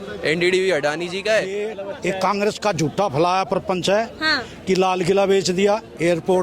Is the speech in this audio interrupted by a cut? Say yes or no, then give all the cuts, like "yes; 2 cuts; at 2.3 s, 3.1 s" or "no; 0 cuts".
yes; 1 cut; at 1.8 s